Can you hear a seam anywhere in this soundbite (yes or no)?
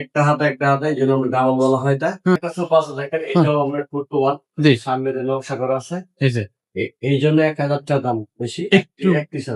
yes